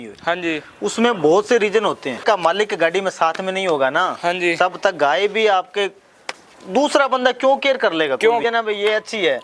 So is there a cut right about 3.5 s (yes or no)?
no